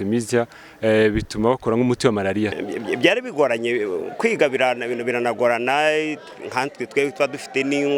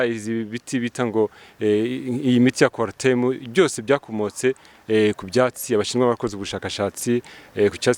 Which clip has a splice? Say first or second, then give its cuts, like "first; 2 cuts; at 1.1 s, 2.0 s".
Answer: first; 1 cut; at 2.6 s